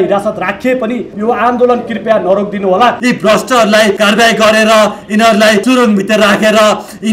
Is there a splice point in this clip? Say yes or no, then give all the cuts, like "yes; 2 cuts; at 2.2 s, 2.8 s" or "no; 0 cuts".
yes; 4 cuts; at 1.1 s, 3.0 s, 4.0 s, 5.6 s